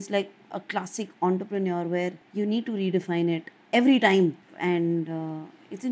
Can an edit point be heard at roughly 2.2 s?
yes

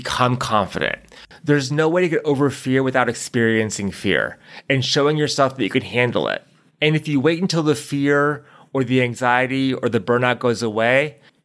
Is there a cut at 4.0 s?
no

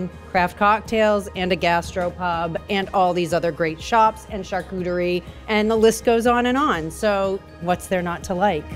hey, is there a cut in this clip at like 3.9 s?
no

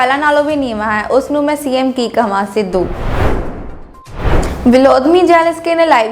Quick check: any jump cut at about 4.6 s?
yes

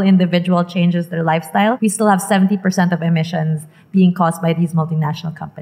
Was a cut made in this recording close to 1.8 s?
yes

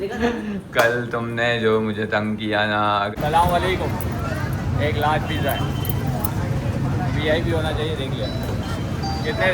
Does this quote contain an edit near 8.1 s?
no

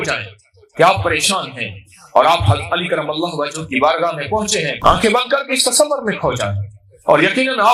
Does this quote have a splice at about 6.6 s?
no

